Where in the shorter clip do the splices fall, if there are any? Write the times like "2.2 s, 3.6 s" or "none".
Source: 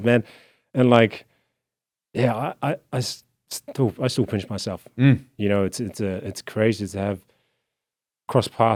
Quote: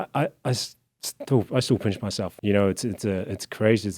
2.3 s